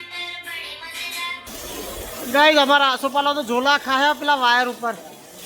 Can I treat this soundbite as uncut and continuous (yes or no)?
no